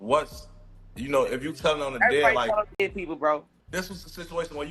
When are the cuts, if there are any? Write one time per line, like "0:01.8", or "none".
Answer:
0:03.6